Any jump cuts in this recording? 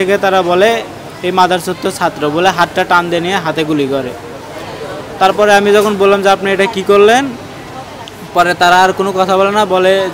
no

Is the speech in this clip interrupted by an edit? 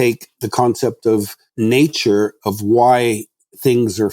yes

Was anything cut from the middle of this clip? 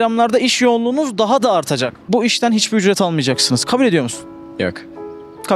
yes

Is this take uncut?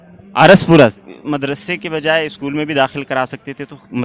yes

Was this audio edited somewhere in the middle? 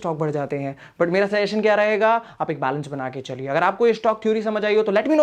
no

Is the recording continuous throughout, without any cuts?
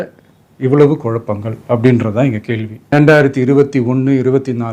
no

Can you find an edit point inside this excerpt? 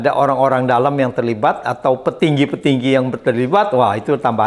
no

